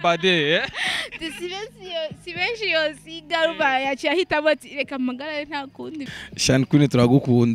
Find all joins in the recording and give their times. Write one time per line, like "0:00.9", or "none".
0:06.0